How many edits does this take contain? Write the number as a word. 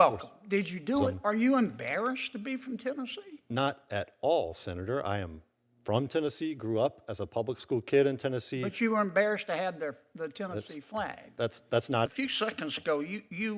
two